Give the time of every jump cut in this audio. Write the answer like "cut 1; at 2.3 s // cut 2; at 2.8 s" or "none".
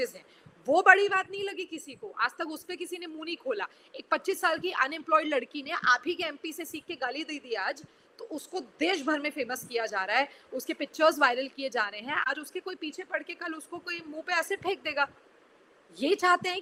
none